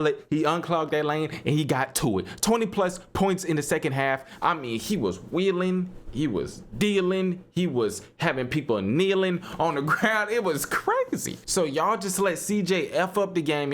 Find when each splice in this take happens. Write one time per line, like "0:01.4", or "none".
0:11.3